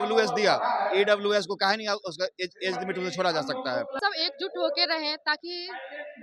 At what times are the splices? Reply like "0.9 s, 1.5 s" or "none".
4.0 s